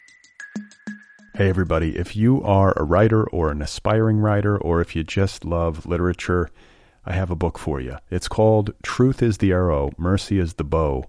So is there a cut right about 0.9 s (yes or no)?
yes